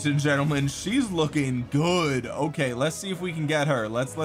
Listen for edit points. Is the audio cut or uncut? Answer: uncut